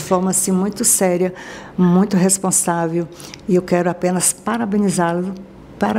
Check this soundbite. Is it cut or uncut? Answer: uncut